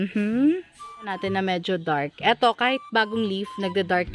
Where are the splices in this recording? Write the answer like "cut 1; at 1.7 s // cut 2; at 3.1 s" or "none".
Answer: cut 1; at 1.1 s

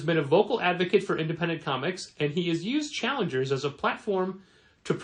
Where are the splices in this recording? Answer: none

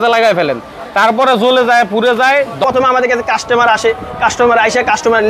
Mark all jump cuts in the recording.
cut 1; at 2.6 s

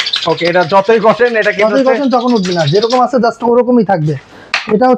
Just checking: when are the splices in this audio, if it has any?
none

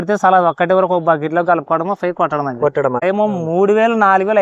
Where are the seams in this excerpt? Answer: cut 1; at 3.0 s

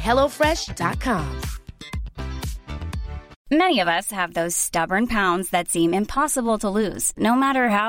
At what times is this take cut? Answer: none

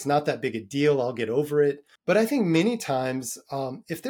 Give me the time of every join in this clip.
cut 1; at 1.9 s

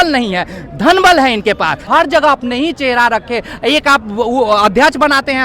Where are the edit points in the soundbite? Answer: cut 1; at 1.8 s

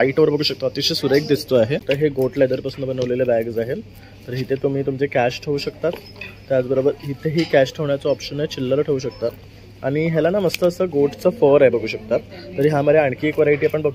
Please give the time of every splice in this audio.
cut 1; at 1.8 s

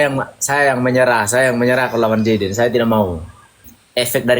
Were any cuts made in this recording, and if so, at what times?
cut 1; at 3.5 s

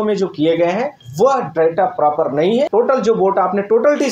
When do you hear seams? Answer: cut 1; at 1.0 s // cut 2; at 2.7 s

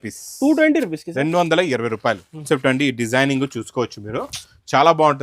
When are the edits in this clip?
cut 1; at 2.4 s

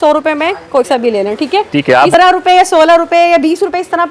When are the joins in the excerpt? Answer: cut 1; at 2.1 s

